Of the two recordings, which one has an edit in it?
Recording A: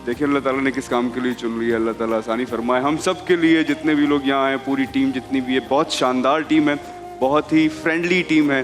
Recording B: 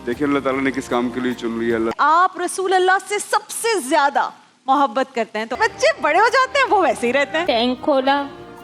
B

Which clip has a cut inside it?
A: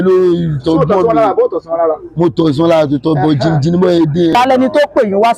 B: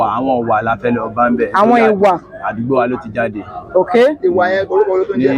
A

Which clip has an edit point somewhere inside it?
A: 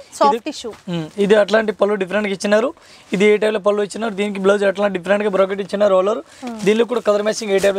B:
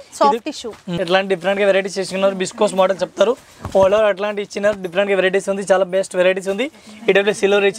B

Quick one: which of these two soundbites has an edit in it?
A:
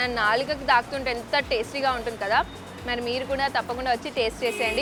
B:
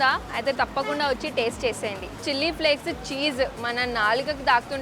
B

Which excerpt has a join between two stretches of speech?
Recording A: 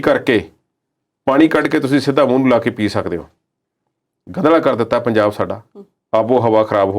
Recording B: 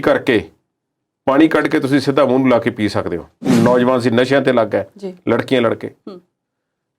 B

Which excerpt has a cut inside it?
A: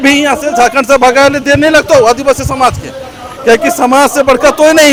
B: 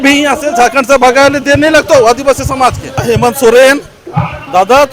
B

